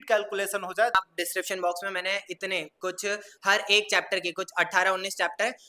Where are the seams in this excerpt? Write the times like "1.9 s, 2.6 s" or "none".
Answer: 1.0 s